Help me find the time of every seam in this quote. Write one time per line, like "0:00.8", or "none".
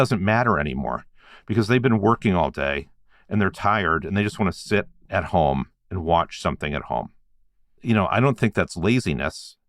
none

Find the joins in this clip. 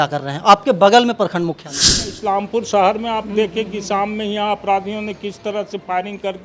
0:02.1

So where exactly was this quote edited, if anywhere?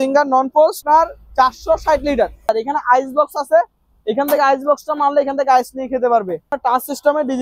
0:00.8
0:02.5
0:06.5

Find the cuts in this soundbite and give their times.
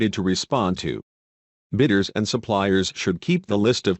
0:02.3

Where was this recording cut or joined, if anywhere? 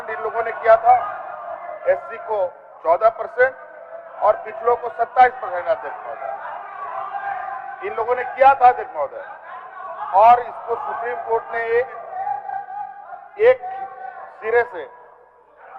none

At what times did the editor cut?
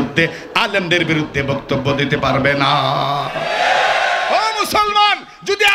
0:04.3

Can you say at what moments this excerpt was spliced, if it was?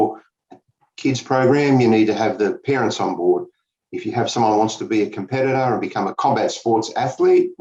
0:06.1

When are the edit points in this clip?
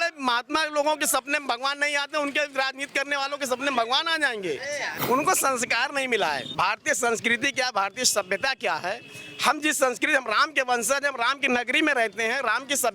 0:04.9
0:06.5

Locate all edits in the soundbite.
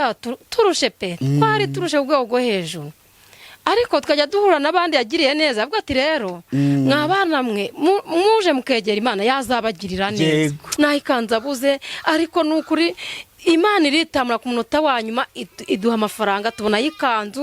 0:10.6

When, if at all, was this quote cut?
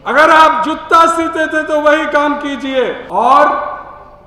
0:03.0

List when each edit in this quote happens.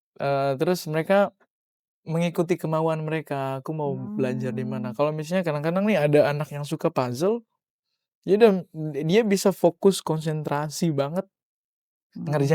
none

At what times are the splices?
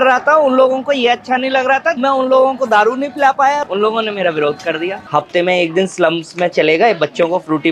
0:02.0
0:03.6
0:05.0

